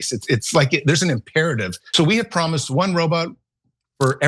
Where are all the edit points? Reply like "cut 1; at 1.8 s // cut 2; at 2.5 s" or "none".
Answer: cut 1; at 1.8 s